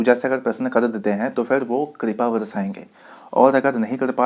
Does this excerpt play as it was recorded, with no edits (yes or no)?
yes